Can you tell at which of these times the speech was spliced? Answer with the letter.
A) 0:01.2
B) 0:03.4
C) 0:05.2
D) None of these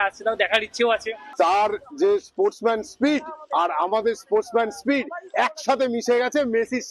A